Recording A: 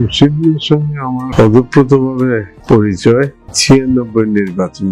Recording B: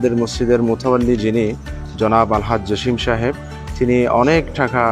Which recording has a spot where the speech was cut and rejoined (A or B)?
A